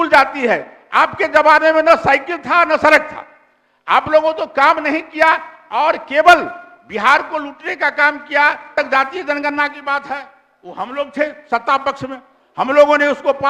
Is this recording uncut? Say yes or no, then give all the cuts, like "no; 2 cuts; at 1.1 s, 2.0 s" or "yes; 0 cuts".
no; 1 cut; at 8.7 s